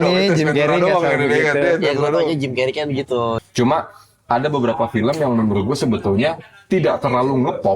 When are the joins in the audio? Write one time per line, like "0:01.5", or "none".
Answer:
0:03.4